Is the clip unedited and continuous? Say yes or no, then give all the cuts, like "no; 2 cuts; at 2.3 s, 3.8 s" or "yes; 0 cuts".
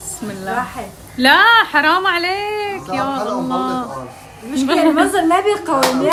yes; 0 cuts